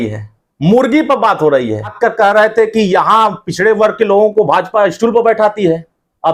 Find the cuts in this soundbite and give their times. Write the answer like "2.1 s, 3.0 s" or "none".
2.0 s